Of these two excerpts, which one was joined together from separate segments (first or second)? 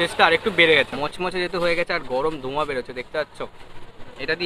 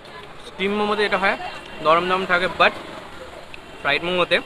first